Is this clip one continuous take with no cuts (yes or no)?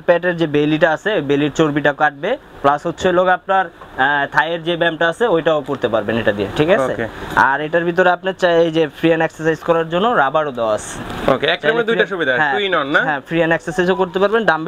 yes